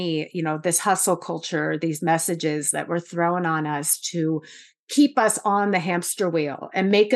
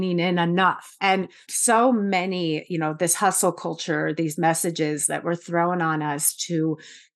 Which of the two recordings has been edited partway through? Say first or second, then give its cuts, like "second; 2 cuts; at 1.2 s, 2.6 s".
second; 1 cut; at 1.1 s